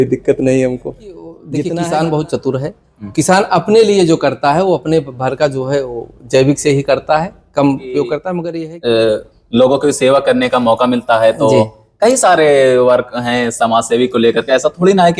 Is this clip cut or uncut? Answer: cut